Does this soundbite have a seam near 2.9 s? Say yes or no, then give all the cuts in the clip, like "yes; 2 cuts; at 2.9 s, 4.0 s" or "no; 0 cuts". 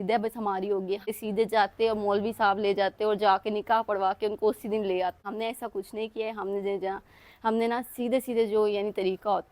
no; 2 cuts; at 1.1 s, 5.3 s